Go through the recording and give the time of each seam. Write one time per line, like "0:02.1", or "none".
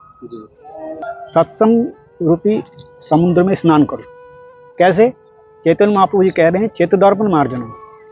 0:01.0